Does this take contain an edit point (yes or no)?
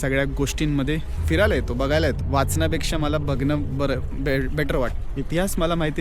yes